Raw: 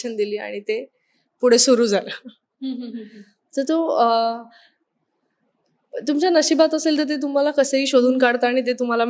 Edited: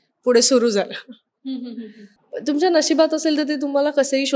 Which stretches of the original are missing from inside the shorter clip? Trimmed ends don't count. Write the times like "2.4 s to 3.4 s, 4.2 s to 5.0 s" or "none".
3.3 s to 5.7 s